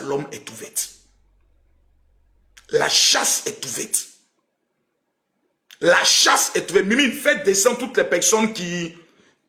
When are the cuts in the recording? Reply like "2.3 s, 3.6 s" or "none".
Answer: none